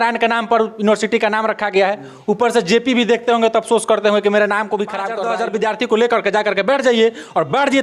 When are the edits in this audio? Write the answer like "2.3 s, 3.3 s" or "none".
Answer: 5.1 s